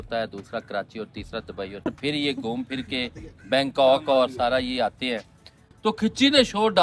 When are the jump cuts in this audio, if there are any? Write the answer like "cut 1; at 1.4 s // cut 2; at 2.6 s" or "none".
cut 1; at 1.9 s // cut 2; at 5.6 s